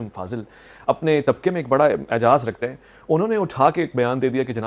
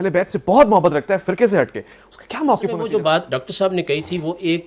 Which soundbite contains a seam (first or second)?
second